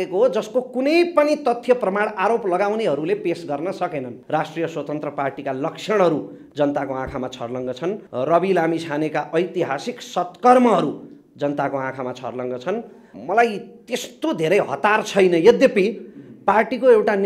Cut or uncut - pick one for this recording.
cut